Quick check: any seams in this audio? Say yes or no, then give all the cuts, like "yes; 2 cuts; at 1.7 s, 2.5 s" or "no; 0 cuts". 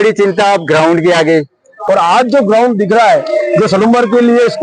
yes; 1 cut; at 1.7 s